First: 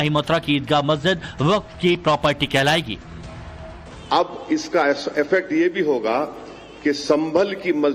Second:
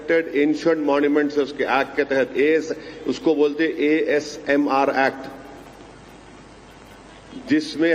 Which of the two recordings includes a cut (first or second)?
second